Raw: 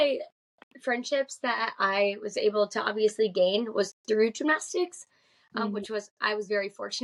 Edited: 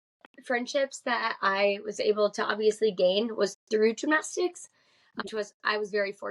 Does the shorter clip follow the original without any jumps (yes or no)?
no